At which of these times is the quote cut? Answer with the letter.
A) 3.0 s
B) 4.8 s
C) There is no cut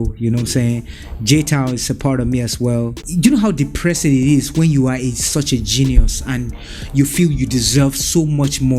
A